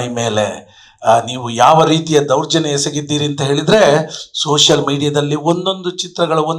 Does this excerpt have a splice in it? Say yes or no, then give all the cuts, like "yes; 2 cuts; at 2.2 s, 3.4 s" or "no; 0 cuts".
no; 0 cuts